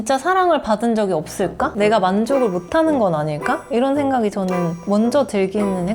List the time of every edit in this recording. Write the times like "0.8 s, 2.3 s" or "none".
none